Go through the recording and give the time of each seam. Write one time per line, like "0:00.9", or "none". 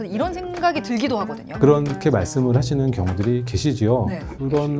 none